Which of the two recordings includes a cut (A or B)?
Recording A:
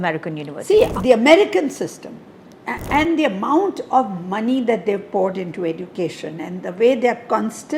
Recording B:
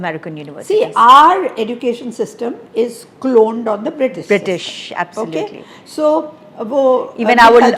A